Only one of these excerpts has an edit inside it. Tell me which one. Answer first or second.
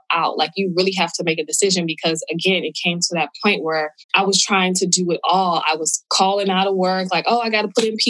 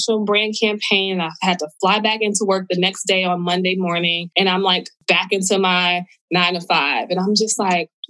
second